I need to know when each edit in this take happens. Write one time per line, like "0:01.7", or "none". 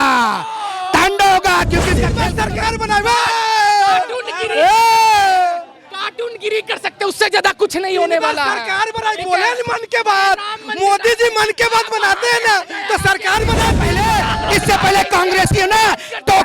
0:02.1
0:13.8